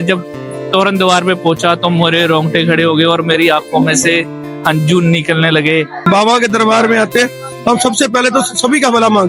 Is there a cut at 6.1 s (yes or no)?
yes